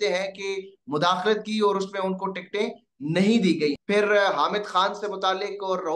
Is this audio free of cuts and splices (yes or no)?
no